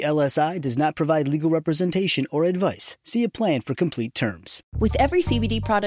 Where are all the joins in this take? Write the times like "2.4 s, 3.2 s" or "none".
4.6 s